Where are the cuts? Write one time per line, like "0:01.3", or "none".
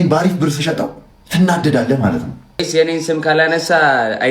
0:02.7